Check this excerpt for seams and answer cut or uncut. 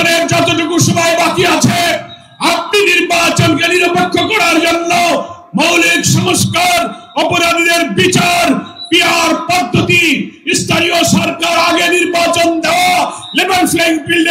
uncut